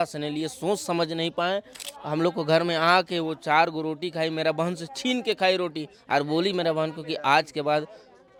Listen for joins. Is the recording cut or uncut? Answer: uncut